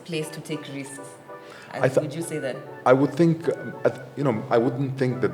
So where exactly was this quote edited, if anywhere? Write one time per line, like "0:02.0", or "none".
none